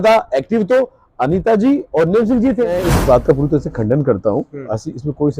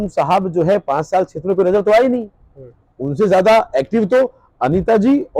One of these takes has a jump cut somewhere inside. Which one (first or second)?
first